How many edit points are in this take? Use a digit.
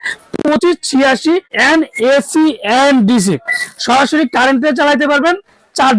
1